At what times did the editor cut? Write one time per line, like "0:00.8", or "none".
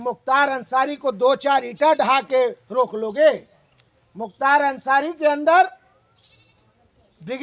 none